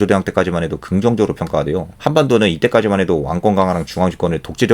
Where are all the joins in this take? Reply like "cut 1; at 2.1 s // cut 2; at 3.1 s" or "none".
cut 1; at 1.9 s